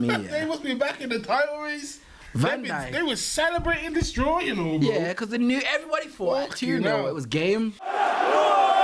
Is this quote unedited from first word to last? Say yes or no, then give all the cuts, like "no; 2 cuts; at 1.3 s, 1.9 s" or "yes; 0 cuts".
no; 1 cut; at 7.8 s